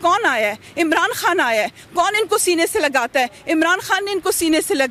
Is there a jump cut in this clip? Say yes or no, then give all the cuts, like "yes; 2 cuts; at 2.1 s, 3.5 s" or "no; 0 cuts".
no; 0 cuts